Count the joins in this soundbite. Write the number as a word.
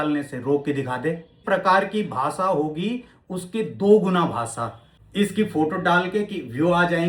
two